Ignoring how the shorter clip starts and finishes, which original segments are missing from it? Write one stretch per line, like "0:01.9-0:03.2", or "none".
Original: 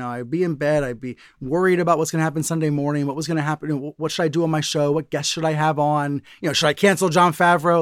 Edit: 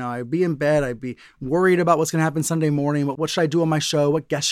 0:03.1-0:04.0